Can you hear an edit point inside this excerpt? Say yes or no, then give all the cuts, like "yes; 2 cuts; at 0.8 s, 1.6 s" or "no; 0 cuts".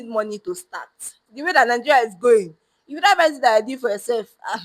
yes; 1 cut; at 1.3 s